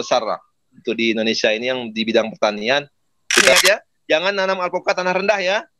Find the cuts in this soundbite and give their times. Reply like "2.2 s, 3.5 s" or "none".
3.5 s